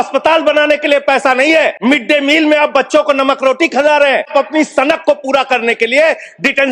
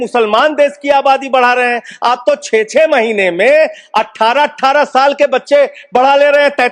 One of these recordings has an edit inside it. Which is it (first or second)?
first